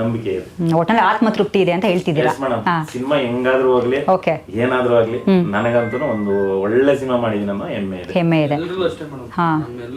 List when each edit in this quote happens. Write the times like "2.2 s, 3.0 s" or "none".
none